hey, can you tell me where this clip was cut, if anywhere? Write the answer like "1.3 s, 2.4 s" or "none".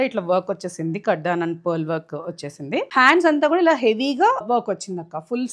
2.9 s, 4.4 s